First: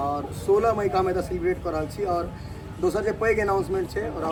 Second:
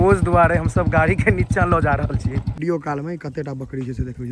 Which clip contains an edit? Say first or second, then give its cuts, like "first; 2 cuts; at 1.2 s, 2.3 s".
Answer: second; 1 cut; at 2.5 s